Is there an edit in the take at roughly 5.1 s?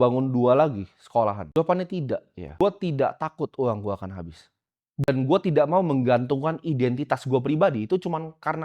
yes; 3 cuts; at 1.4 s, 2.4 s, 5.1 s

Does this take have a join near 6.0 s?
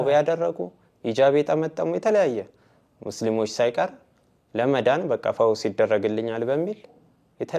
no; 0 cuts

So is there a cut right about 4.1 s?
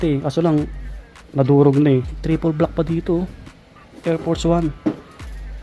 no; 1 cut; at 2.2 s

